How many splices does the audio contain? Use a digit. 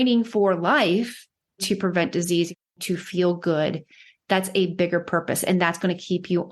2